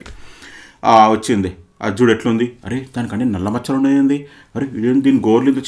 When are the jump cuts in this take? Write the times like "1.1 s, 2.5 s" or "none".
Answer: none